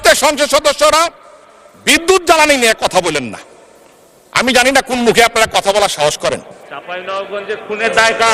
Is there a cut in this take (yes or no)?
no